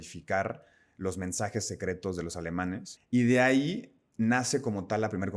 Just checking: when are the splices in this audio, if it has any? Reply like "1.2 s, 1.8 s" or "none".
2.9 s